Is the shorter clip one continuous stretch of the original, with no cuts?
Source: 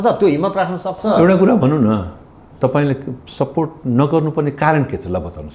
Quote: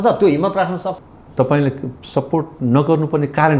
no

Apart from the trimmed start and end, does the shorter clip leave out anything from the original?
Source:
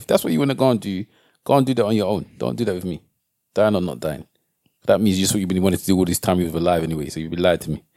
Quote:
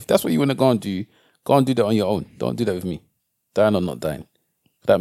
no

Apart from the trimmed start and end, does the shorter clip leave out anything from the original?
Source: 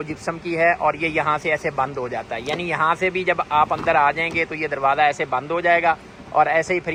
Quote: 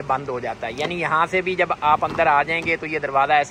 no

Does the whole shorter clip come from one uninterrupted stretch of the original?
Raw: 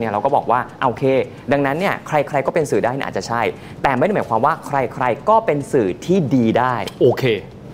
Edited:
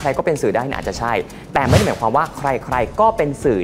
yes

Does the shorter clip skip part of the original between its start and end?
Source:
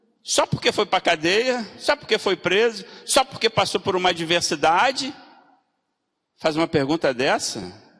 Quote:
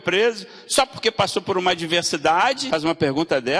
yes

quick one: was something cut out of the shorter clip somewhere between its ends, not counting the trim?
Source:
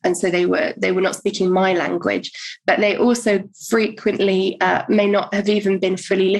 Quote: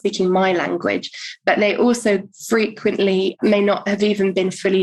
yes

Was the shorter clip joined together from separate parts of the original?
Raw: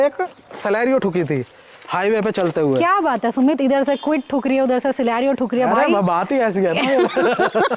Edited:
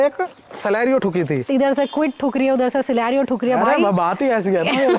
yes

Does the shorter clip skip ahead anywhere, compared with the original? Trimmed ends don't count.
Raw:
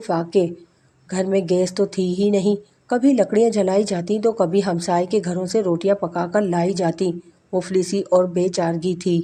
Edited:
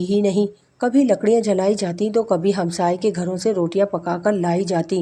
no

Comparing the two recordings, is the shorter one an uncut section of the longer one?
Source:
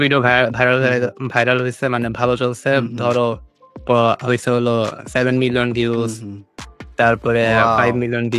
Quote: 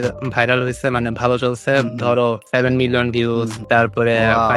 no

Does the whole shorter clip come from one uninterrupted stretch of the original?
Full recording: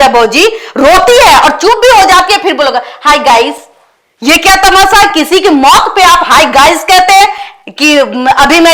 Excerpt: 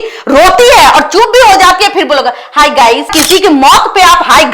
no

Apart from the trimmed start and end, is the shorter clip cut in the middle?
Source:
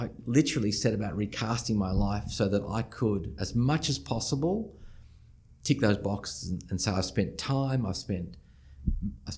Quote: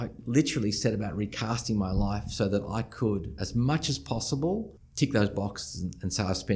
yes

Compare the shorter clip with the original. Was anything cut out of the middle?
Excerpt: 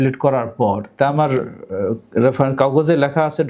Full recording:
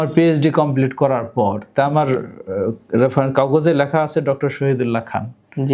no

